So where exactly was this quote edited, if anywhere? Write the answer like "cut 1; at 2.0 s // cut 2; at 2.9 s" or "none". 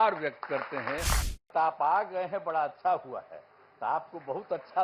cut 1; at 1.5 s